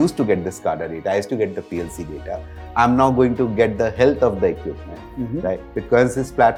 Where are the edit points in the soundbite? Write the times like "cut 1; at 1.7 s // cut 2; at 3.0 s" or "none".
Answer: none

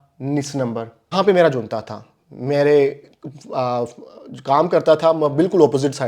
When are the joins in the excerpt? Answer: cut 1; at 1.1 s

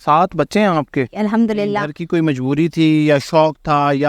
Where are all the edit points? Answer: cut 1; at 1.9 s

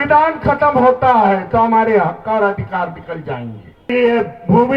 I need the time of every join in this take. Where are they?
cut 1; at 3.9 s

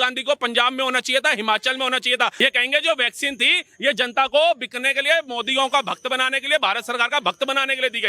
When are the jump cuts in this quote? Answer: cut 1; at 2.3 s

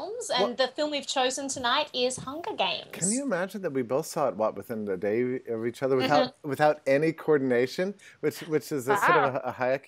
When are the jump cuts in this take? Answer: cut 1; at 3.3 s

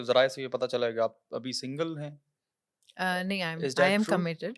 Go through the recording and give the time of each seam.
none

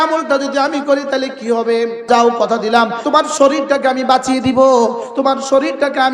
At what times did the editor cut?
cut 1; at 2.1 s // cut 2; at 3.0 s

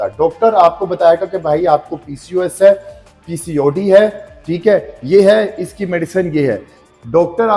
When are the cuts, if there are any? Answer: none

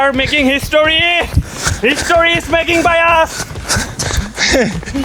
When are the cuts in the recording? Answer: none

